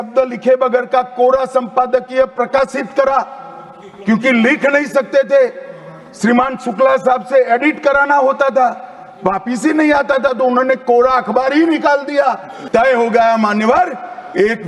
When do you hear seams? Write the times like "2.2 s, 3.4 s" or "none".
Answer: 12.6 s